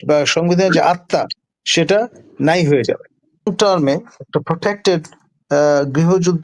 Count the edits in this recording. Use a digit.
1